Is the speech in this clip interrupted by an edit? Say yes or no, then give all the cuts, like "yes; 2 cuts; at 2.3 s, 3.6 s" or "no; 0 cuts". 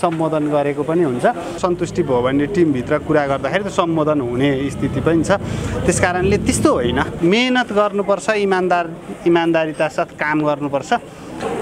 yes; 2 cuts; at 1.6 s, 7.1 s